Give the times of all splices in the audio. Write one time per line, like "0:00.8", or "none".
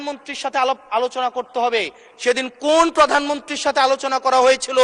none